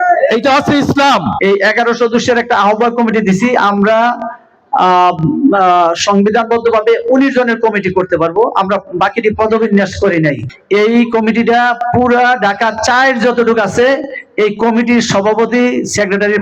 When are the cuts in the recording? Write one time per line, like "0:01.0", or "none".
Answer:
0:01.3
0:10.5